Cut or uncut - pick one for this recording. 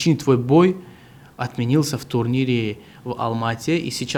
uncut